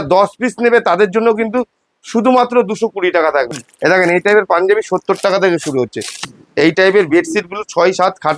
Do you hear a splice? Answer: yes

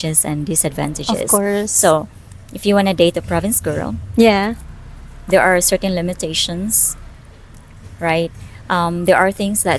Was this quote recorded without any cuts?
yes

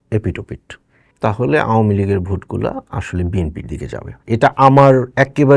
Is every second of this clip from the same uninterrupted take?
no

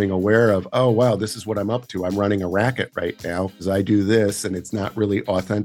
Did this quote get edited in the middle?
yes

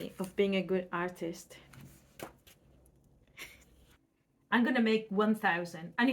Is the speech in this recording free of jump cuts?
no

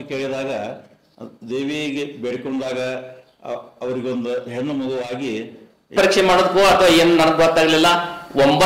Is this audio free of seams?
no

